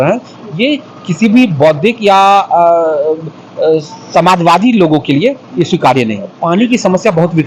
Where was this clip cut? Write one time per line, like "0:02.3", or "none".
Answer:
0:06.3